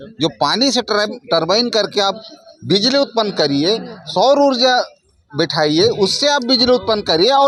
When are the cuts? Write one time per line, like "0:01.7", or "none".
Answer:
none